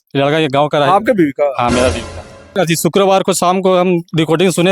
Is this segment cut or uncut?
cut